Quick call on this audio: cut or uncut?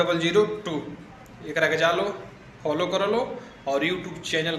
uncut